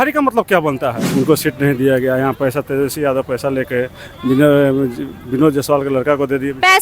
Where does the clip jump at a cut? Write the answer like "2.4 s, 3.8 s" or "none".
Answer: 1.0 s